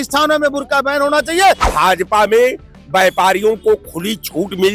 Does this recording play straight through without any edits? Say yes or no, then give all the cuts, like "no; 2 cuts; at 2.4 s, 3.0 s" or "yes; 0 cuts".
no; 1 cut; at 1.7 s